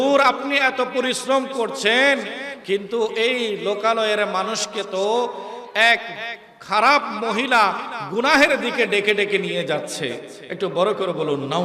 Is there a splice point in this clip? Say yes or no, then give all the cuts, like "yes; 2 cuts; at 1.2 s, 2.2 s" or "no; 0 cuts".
no; 0 cuts